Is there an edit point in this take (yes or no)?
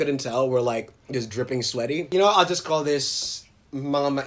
yes